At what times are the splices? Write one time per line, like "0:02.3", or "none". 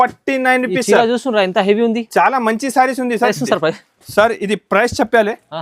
0:03.4